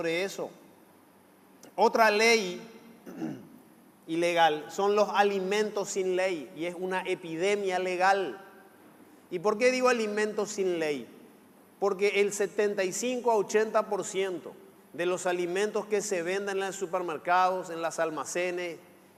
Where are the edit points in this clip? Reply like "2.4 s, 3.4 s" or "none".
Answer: none

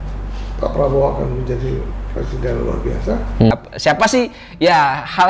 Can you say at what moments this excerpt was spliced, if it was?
3.5 s

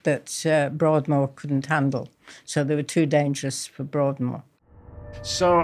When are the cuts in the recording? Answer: 4.7 s

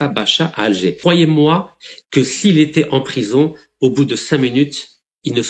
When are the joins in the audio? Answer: 1.0 s

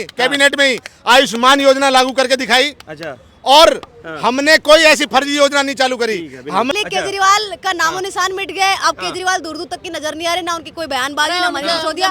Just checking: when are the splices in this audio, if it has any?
6.7 s

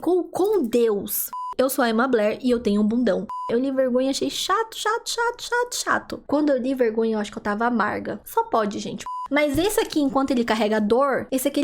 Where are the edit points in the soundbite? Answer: 1.4 s, 3.3 s, 6.2 s, 9.2 s

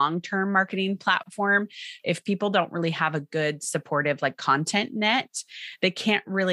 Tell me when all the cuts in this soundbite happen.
1.7 s

